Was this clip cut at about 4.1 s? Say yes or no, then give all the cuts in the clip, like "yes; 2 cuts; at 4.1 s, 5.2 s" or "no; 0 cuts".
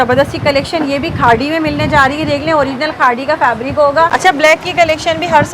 yes; 1 cut; at 4.1 s